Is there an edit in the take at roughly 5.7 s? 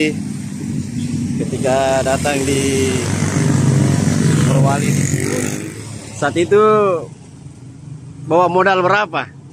yes; 1 cut; at 5.7 s

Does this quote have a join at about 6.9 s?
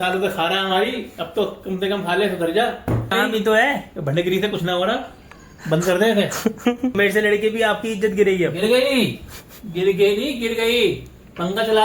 yes; 2 cuts; at 3.1 s, 6.9 s

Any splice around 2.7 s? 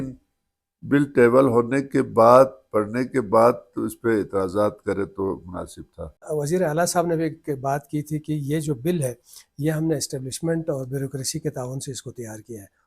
no; 1 cut; at 6.2 s

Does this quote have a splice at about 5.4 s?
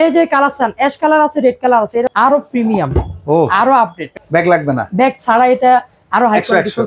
no; 2 cuts; at 2.1 s, 4.0 s

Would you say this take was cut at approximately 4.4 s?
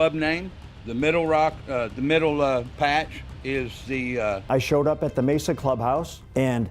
yes; 1 cut; at 4.4 s

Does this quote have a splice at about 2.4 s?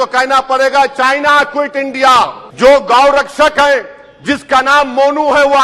yes; 1 cut; at 2.4 s

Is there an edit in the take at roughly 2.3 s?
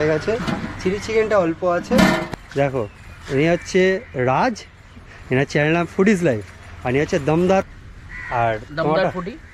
yes; 2 cuts; at 2.3 s, 7.7 s

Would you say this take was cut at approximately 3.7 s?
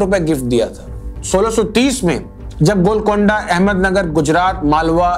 no; 1 cut; at 1.2 s

